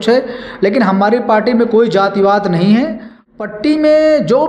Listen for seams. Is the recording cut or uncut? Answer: cut